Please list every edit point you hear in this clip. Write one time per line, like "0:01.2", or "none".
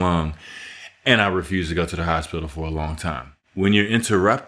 0:03.3

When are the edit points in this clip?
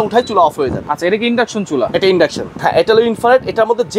0:02.5

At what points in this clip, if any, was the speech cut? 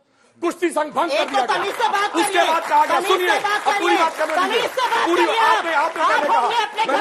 none

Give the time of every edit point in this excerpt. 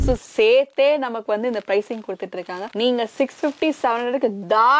none

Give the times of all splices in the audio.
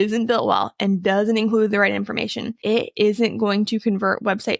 0:02.5

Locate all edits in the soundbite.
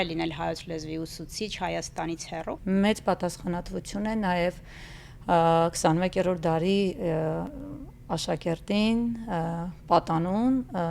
0:02.6

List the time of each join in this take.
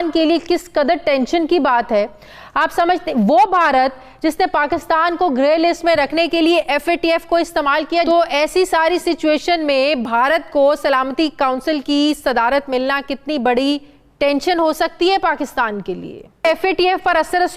0:08.1
0:16.5

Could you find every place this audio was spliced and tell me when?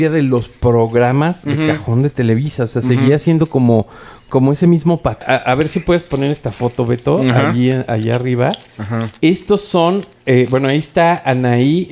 0:05.2

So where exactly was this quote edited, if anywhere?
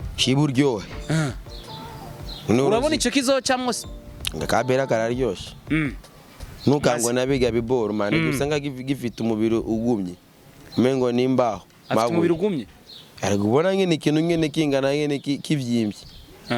none

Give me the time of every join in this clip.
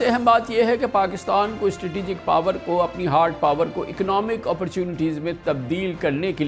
none

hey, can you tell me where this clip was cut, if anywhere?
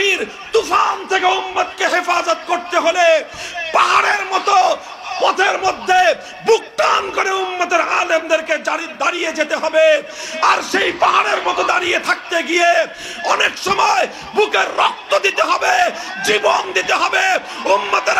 none

